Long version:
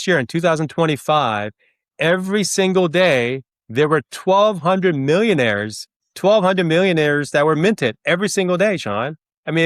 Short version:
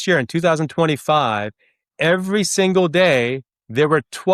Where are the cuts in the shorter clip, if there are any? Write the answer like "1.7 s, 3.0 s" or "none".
none